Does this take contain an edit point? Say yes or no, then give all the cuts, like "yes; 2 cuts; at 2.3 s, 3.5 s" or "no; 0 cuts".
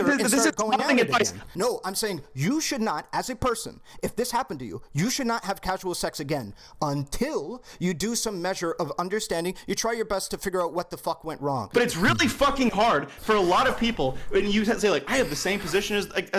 yes; 2 cuts; at 1.4 s, 11.7 s